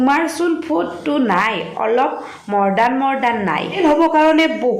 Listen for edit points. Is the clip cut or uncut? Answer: cut